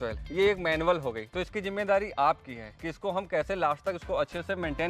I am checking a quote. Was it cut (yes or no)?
no